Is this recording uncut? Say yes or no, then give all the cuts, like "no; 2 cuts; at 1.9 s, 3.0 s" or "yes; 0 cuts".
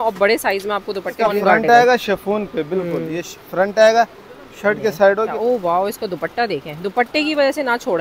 no; 2 cuts; at 1.2 s, 5.3 s